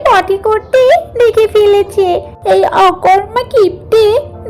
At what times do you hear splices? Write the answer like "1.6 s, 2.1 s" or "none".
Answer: 2.3 s